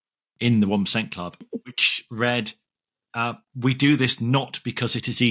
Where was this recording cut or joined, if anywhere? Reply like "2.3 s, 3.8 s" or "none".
1.5 s

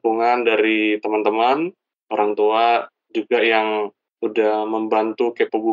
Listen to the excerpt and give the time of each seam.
none

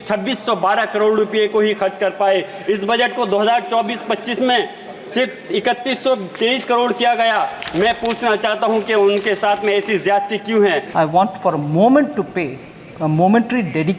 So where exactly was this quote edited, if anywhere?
10.9 s

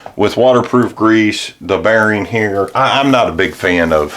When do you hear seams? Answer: 2.7 s

